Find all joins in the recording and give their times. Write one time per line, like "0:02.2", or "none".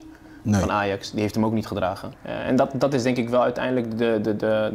0:02.1